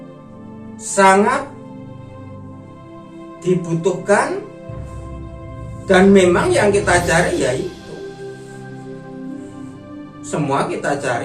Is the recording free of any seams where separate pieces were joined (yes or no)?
no